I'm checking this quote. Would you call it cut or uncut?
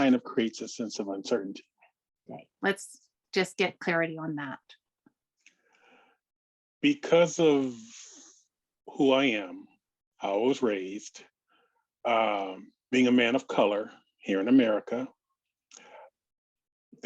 cut